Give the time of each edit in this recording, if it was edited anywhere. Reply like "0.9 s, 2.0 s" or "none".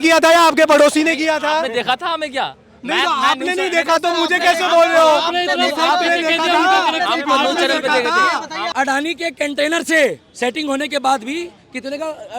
8.7 s